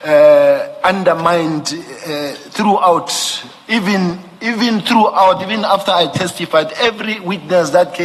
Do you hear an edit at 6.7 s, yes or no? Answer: no